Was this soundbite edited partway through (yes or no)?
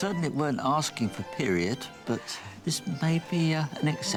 no